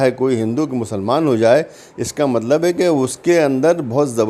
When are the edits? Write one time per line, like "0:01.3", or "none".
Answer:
none